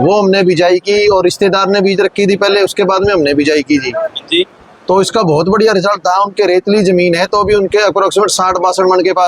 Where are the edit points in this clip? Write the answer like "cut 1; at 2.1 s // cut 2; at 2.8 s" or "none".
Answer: none